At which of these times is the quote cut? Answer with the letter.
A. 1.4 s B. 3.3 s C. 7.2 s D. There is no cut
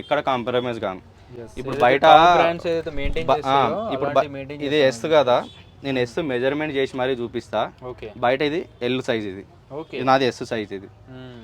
D